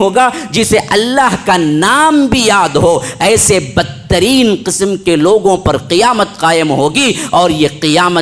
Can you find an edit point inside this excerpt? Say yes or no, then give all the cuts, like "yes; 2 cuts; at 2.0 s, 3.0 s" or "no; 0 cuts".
no; 0 cuts